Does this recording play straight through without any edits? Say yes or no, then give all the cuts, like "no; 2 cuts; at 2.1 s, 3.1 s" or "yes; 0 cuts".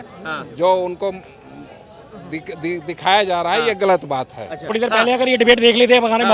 no; 1 cut; at 4.6 s